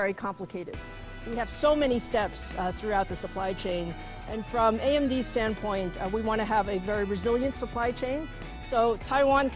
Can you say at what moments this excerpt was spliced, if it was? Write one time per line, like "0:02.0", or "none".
none